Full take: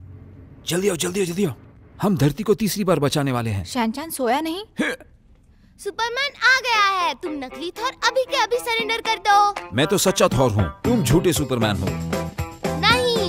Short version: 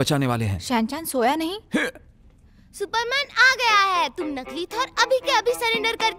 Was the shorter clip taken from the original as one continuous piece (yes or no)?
yes